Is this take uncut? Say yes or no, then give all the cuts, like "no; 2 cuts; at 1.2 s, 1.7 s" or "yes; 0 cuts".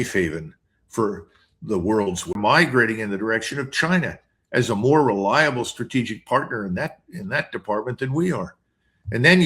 no; 1 cut; at 2.3 s